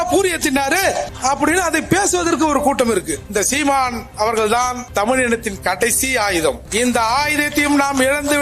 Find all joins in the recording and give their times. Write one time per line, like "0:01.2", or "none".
0:03.2